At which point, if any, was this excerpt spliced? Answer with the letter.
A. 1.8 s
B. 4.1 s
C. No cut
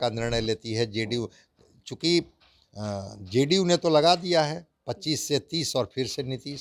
C